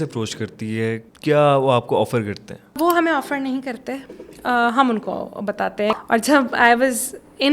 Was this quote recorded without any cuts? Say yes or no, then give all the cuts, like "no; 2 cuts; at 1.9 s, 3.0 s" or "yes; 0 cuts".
no; 3 cuts; at 1.1 s, 2.8 s, 6.0 s